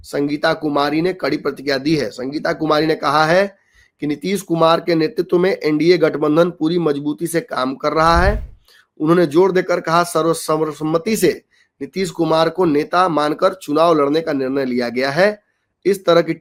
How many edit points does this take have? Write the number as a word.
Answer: zero